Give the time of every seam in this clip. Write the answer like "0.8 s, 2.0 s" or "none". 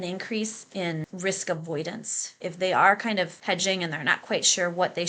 1.0 s, 2.4 s, 3.4 s